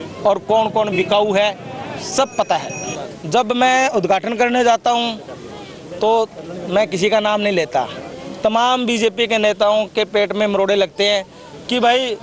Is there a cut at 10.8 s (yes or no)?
no